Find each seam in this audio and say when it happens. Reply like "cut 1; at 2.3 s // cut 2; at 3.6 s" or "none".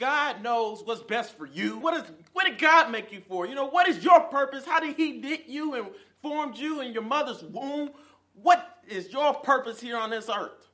cut 1; at 1.8 s